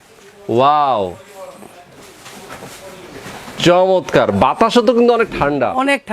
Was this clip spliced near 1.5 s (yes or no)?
no